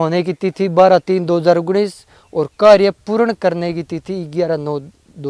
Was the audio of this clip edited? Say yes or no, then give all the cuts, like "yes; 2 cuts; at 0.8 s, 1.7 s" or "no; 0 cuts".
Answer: no; 0 cuts